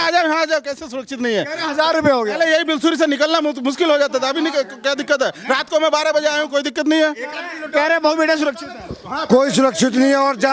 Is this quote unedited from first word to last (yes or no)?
yes